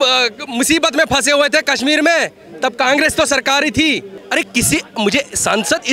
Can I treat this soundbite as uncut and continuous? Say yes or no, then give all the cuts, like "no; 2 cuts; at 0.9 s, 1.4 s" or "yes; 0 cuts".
no; 1 cut; at 4.1 s